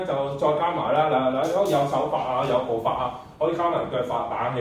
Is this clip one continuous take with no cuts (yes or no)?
yes